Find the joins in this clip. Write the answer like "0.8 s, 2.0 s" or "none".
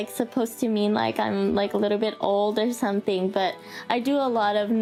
none